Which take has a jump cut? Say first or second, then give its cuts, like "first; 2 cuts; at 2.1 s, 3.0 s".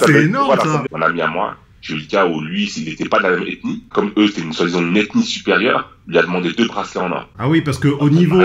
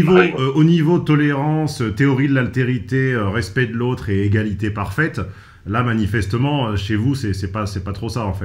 first; 3 cuts; at 0.8 s, 3.9 s, 7.3 s